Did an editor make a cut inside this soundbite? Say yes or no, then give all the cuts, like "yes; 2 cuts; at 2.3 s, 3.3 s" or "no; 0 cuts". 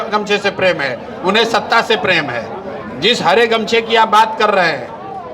no; 0 cuts